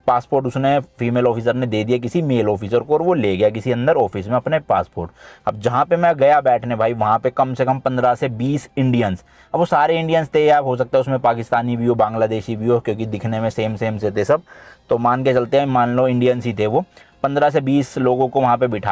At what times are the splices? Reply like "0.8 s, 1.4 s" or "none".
none